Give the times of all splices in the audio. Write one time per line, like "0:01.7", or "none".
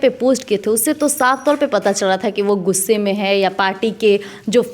none